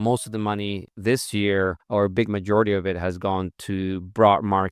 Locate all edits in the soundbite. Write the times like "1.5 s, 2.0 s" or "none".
0.9 s, 1.8 s

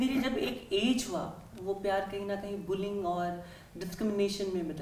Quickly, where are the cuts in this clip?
none

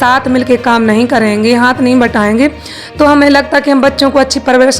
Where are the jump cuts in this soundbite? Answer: none

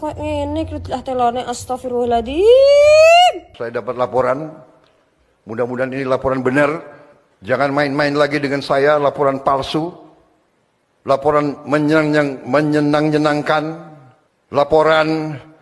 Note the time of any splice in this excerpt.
3.5 s

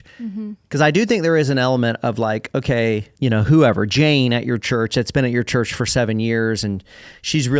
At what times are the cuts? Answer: 3.1 s

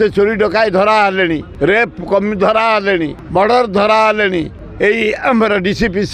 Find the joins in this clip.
1.5 s, 3.2 s, 4.6 s

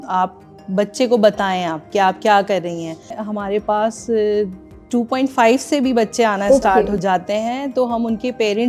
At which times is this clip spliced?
3.2 s

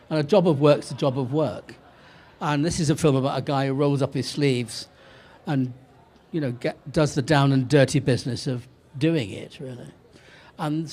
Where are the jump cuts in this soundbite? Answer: none

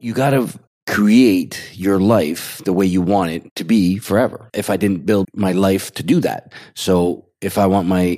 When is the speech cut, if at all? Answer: none

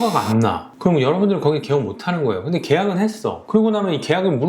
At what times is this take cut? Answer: 3.4 s

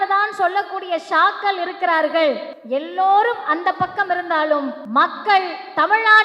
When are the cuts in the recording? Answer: 2.5 s, 4.8 s

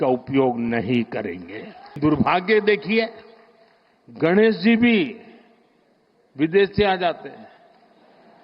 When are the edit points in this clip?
2.0 s

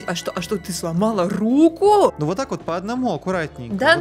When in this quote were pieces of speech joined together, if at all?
2.2 s

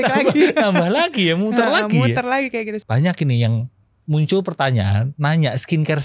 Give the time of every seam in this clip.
2.8 s

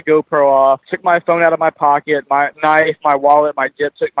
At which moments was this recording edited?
0.9 s, 2.5 s

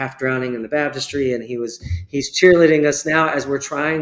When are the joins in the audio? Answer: none

